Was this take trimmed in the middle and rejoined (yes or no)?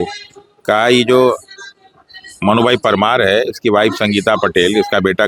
no